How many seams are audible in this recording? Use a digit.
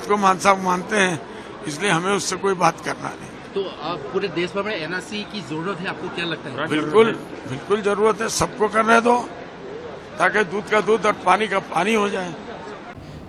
0